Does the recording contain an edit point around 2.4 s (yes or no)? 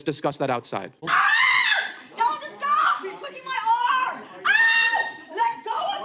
no